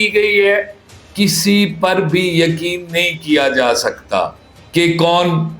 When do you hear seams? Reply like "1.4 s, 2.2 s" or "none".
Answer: 1.0 s